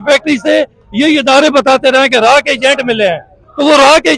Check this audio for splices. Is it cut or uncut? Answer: uncut